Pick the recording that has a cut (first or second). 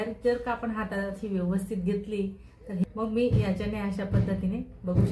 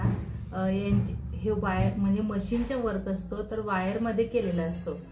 first